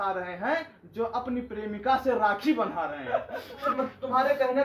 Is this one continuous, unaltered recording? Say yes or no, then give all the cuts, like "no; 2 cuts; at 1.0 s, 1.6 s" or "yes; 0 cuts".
no; 1 cut; at 3.7 s